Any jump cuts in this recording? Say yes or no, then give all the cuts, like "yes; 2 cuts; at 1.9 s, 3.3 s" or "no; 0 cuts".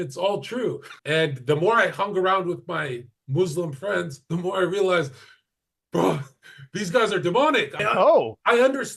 yes; 2 cuts; at 0.9 s, 7.8 s